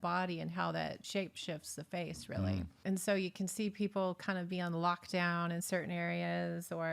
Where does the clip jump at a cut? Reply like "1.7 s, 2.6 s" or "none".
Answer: 1.0 s, 2.7 s